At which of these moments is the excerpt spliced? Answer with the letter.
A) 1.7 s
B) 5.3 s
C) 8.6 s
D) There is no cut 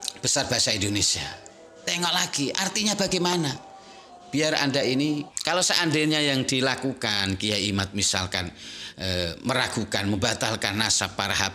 B